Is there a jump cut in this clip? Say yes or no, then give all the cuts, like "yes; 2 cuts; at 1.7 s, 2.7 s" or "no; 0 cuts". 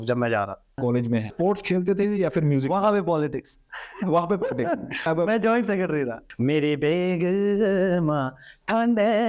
yes; 3 cuts; at 1.2 s, 5.1 s, 6.2 s